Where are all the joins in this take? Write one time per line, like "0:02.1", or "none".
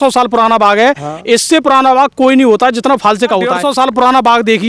0:03.6